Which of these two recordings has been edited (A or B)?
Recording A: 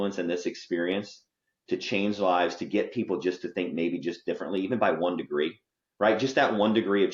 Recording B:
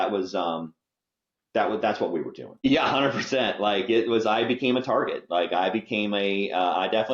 B